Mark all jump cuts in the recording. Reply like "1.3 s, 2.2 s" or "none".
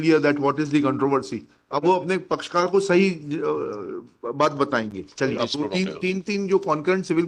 5.4 s

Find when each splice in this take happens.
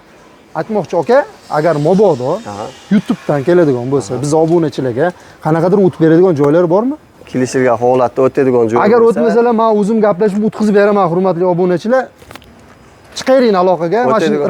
7.1 s

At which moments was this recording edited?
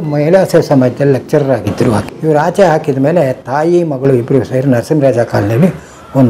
2.1 s

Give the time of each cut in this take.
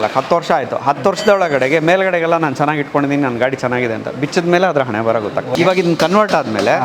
5.5 s

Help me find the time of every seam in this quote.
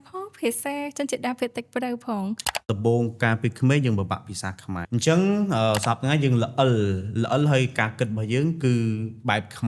2.7 s, 4.8 s

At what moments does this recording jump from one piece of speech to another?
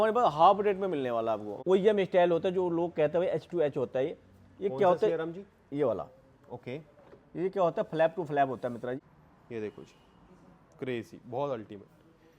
1.5 s, 9.0 s

